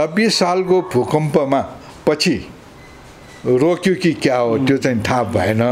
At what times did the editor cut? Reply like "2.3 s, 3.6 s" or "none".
none